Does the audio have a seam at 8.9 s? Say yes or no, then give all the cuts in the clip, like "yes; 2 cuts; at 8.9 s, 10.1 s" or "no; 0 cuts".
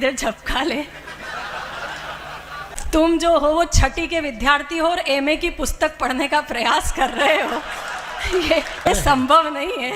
yes; 2 cuts; at 2.8 s, 8.9 s